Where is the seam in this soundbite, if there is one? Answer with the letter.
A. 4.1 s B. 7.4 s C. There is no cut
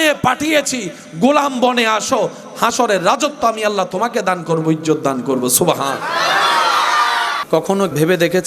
B